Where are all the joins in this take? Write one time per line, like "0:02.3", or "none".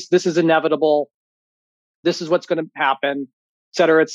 none